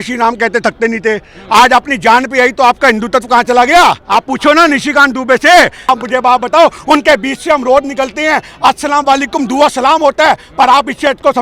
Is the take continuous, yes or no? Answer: no